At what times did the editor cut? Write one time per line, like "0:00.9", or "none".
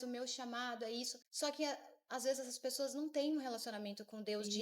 0:01.2